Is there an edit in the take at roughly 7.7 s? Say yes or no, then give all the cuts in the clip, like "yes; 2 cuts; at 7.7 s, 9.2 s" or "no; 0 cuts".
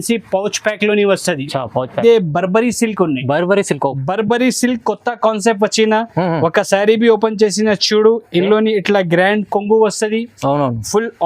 no; 1 cut; at 2.0 s